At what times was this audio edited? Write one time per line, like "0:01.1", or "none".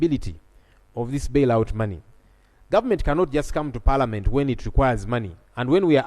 none